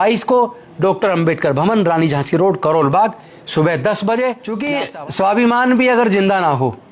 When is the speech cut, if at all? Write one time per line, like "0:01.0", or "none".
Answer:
0:04.7